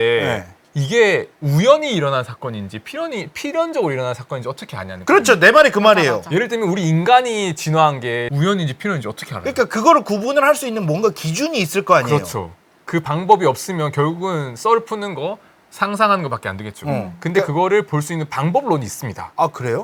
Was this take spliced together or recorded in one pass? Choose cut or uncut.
uncut